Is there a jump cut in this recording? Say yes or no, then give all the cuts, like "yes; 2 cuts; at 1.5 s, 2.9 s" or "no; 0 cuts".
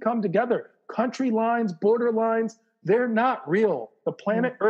no; 0 cuts